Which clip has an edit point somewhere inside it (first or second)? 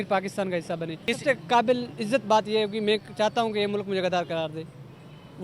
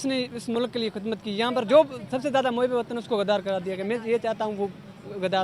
first